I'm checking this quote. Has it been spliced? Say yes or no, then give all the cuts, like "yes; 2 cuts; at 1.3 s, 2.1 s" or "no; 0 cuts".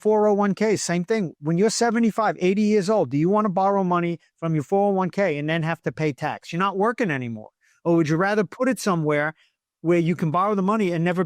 no; 0 cuts